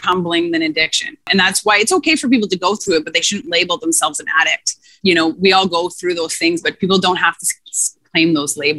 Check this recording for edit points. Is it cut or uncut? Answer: cut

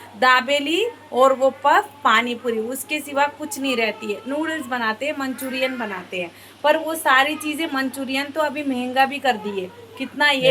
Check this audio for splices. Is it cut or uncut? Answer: uncut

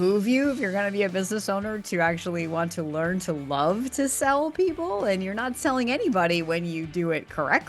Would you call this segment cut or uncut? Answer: uncut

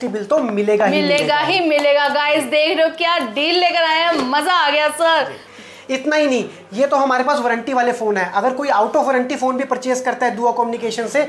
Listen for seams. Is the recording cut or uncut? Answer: uncut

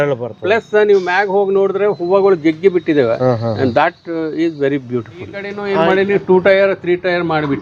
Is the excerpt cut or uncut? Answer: cut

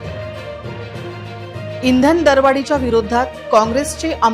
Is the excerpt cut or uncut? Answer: uncut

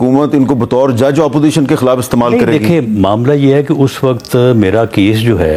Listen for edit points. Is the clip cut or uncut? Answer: uncut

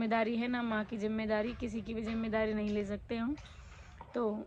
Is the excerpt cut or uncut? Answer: uncut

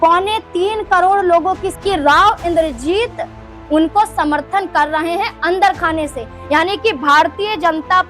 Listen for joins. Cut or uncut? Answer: cut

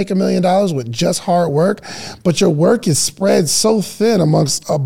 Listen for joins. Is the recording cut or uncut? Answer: uncut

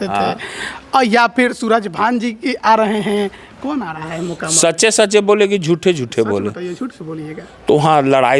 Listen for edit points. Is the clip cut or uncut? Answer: uncut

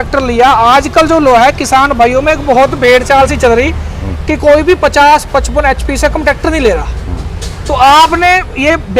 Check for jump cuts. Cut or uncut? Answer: uncut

